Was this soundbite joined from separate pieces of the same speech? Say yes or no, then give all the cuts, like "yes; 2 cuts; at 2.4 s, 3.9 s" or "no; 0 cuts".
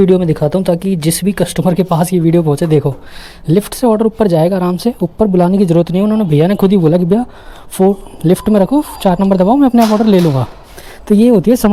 no; 0 cuts